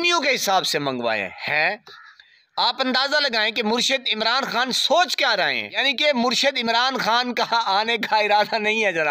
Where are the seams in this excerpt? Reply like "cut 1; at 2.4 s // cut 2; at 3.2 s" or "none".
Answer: cut 1; at 5.8 s